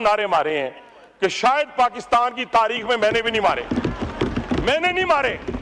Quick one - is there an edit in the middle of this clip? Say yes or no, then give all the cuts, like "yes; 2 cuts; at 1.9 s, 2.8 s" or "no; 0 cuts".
no; 0 cuts